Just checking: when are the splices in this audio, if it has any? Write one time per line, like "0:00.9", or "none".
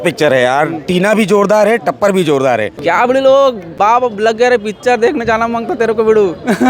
0:02.7
0:03.9